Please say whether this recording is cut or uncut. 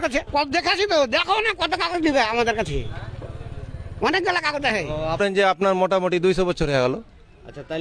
cut